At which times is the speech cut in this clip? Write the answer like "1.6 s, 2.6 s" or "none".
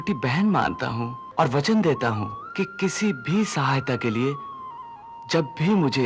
1.2 s, 2.4 s